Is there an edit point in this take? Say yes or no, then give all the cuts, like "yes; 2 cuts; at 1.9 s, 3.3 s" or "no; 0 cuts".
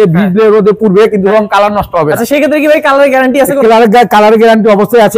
no; 0 cuts